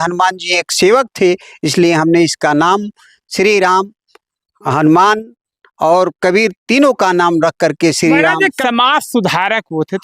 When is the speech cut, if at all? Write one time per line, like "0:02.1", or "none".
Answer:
0:08.6